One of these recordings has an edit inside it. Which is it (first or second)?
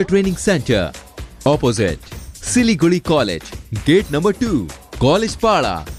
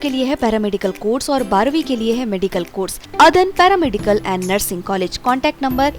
second